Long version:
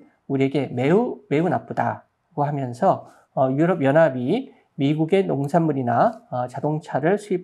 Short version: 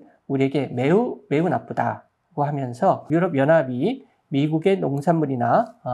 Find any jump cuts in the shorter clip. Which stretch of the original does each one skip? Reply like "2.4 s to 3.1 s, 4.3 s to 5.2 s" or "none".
3.1 s to 3.5 s